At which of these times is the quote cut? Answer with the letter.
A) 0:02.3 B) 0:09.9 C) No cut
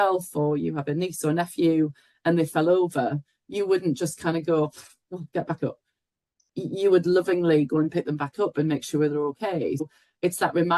B